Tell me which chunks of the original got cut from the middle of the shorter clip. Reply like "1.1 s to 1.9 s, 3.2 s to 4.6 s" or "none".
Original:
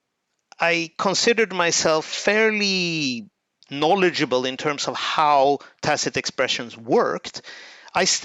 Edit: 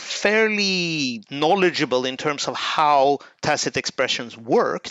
3.2 s to 3.6 s